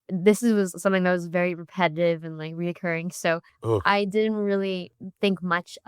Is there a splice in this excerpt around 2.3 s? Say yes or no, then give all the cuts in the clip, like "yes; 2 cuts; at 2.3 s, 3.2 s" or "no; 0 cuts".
no; 2 cuts; at 3.5 s, 5.0 s